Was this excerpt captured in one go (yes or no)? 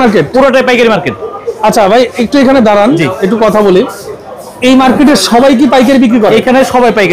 yes